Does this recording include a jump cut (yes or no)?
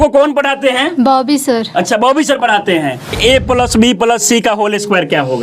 yes